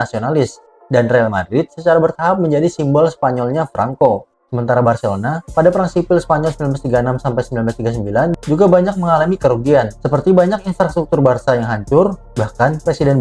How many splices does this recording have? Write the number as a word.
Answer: zero